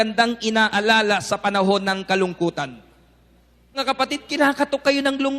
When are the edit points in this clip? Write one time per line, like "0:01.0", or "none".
0:03.8

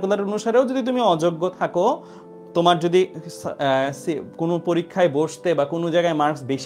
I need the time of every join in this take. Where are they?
none

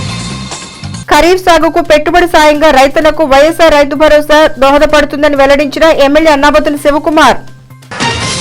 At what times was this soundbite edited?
0:01.0

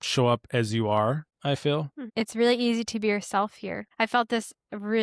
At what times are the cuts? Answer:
0:01.3
0:02.0
0:03.8

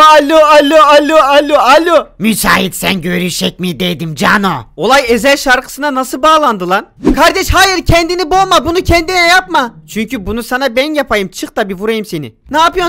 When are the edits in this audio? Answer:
0:07.0

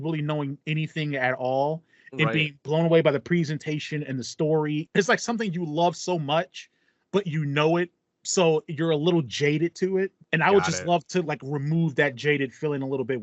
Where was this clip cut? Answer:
0:04.9
0:10.2

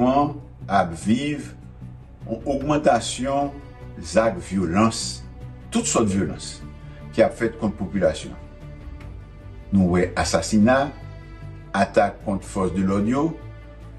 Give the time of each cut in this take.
0:08.3
0:09.7

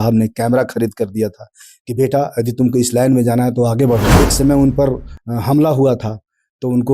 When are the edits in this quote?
0:04.1

